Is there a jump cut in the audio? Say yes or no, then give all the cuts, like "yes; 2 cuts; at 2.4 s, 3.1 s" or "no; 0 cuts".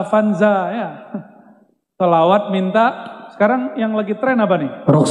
no; 0 cuts